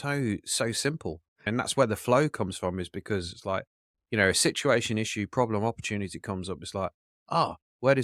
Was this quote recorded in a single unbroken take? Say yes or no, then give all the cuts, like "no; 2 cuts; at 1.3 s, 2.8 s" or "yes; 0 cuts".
no; 1 cut; at 1.5 s